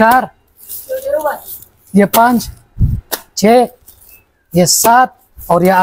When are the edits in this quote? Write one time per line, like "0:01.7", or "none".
none